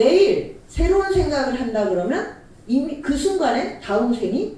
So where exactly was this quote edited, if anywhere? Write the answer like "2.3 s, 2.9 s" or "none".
none